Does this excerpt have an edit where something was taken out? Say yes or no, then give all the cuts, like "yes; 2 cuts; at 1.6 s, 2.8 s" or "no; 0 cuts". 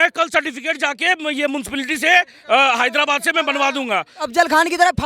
yes; 1 cut; at 4.2 s